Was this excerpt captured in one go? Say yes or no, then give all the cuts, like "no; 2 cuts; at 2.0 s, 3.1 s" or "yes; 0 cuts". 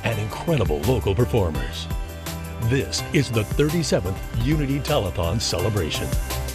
yes; 0 cuts